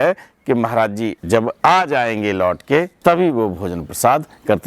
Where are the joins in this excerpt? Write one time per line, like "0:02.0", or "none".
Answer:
0:01.5
0:02.9